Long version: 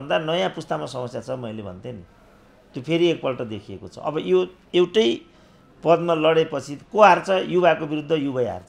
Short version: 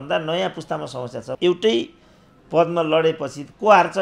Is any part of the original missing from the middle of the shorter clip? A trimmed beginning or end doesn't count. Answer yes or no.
yes